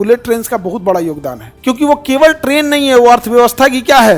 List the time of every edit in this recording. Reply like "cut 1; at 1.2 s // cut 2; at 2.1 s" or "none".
cut 1; at 1.4 s